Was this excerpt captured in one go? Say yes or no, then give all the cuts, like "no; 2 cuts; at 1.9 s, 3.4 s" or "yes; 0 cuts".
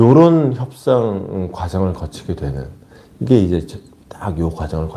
yes; 0 cuts